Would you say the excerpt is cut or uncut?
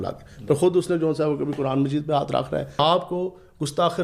cut